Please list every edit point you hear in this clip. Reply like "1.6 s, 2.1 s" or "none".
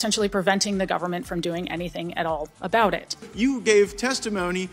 3.2 s